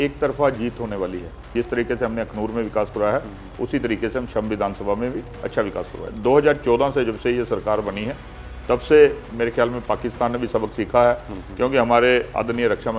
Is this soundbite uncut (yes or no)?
no